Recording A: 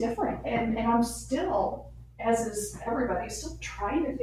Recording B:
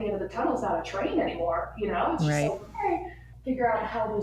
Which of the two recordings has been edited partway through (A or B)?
B